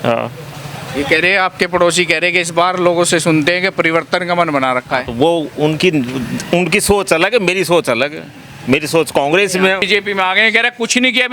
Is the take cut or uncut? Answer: cut